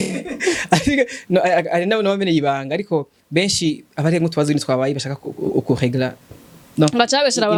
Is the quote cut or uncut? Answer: uncut